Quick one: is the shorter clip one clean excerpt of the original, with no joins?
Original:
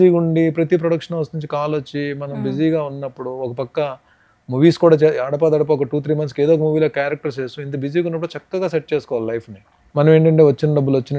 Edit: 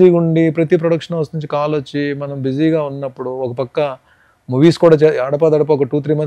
yes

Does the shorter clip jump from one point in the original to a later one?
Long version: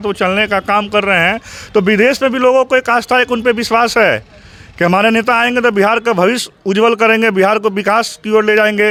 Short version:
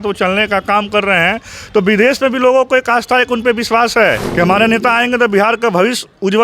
yes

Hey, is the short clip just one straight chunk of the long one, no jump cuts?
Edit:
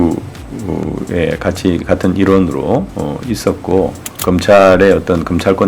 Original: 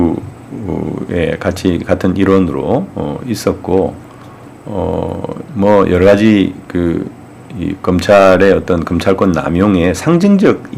no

